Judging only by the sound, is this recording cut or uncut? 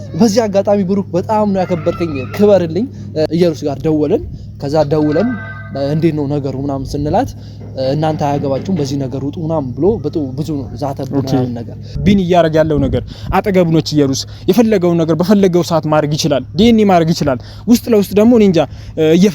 cut